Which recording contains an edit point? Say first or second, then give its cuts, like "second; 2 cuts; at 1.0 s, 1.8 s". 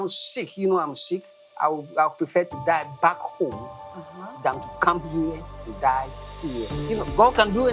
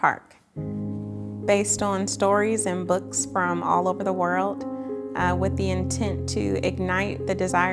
first; 1 cut; at 6.8 s